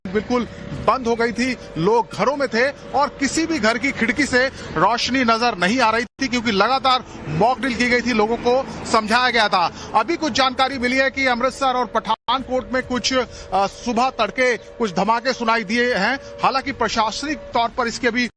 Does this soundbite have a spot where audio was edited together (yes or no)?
yes